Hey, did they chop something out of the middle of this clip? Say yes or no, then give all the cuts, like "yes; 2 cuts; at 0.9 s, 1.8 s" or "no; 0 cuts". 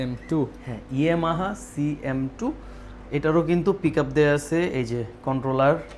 no; 0 cuts